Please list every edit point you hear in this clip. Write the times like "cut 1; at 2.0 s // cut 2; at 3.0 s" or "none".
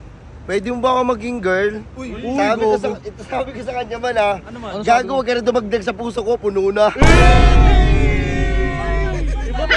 none